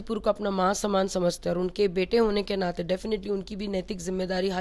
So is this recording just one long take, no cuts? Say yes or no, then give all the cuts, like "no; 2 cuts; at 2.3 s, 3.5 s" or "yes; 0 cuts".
yes; 0 cuts